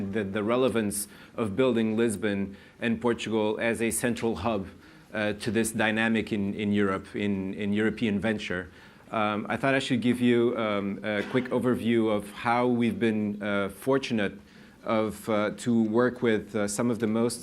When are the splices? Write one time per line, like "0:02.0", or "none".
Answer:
0:15.6